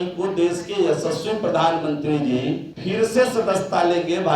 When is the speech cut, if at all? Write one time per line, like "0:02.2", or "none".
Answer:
0:02.7

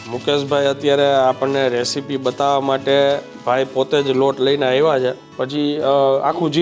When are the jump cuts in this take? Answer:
0:05.2

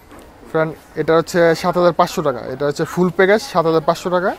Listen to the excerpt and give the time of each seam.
none

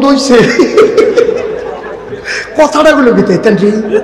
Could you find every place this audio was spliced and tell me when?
none

